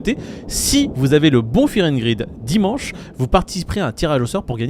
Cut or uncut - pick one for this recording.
uncut